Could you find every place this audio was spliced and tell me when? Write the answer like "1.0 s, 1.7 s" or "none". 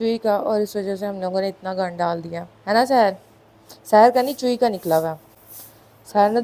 none